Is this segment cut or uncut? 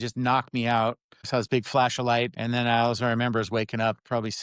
cut